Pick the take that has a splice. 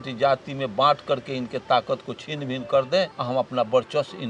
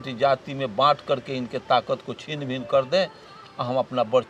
first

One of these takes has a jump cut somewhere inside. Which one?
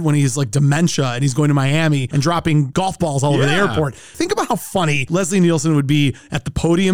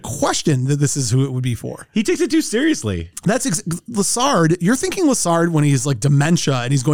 first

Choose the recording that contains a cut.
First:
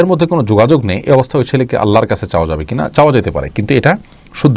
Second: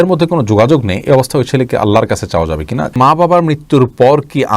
second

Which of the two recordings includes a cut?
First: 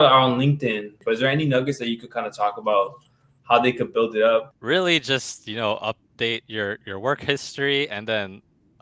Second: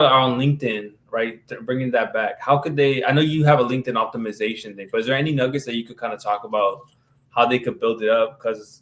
first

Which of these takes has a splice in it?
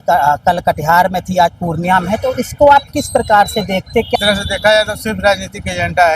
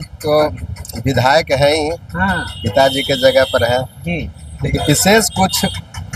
first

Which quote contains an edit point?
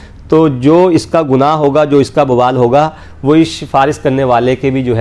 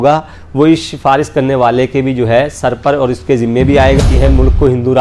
second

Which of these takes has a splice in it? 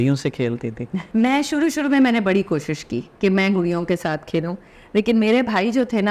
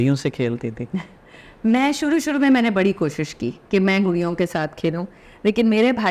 first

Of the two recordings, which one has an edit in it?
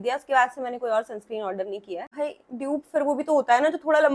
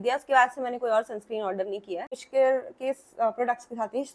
first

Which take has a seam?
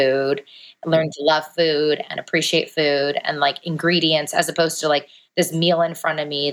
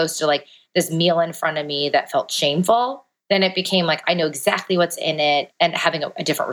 second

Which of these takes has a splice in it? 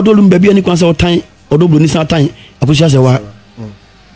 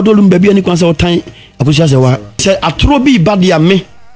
second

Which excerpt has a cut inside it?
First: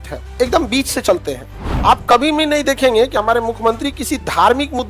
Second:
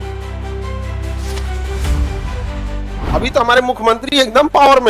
second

